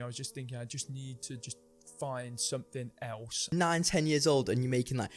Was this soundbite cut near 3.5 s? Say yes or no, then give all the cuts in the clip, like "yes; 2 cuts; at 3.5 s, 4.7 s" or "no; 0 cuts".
yes; 1 cut; at 3.5 s